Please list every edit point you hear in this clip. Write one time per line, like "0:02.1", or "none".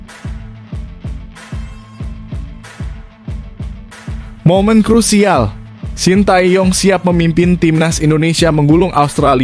none